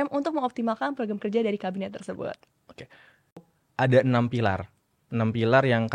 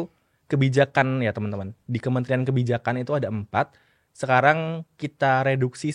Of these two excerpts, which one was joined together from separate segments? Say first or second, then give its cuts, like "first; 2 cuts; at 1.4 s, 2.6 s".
first; 1 cut; at 3.5 s